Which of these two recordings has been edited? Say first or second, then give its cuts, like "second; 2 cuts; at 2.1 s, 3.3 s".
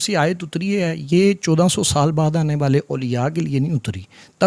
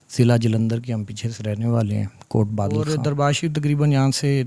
second; 1 cut; at 2.9 s